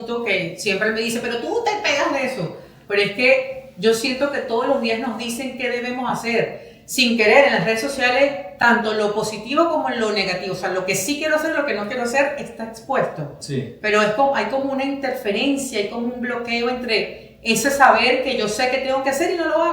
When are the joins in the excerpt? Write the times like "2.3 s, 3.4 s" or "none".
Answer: none